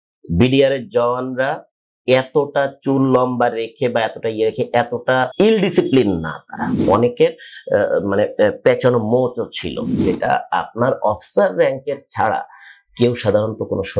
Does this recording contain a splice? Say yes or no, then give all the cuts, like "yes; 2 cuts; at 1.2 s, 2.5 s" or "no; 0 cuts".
yes; 3 cuts; at 5.3 s, 6.8 s, 10.0 s